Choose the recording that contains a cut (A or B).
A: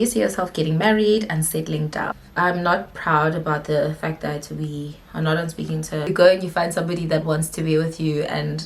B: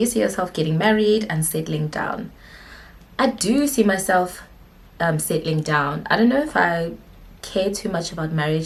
A